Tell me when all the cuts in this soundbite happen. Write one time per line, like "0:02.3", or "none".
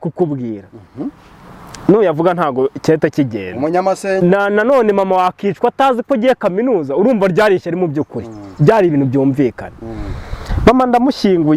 0:04.2

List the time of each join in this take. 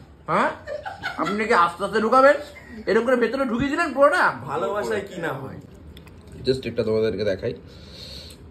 0:05.7

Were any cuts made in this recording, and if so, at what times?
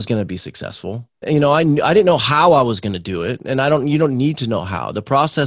0:01.2

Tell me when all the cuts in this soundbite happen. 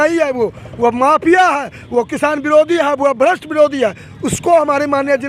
none

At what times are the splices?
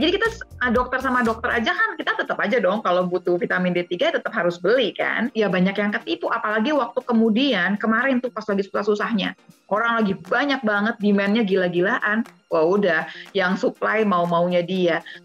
0:05.3

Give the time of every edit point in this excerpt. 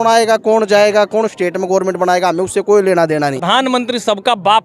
0:03.4

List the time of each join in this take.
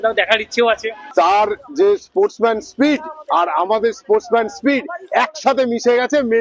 0:01.0

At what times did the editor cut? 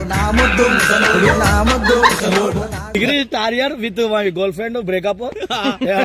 0:03.0

